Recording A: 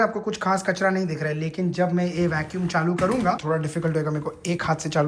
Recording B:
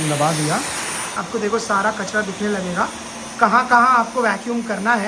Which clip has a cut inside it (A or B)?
B